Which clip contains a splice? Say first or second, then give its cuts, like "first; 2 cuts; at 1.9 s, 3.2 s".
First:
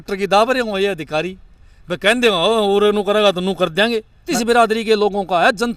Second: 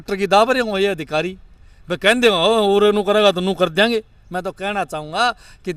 first; 1 cut; at 4.3 s